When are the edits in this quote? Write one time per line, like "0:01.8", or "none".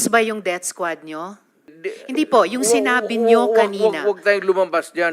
0:01.7